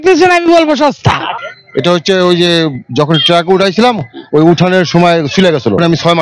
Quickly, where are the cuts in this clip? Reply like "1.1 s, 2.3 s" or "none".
1.3 s

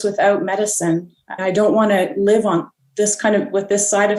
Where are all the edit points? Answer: none

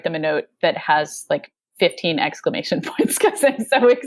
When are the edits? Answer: none

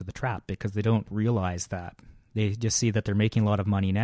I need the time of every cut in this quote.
1.1 s

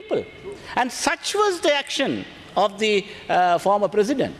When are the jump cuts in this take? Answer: none

